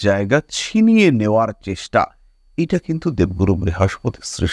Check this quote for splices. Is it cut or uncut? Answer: uncut